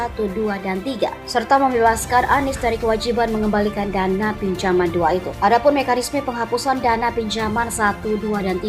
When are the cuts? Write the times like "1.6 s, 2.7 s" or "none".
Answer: none